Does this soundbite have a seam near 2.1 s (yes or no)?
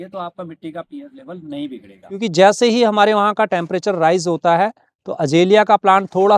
yes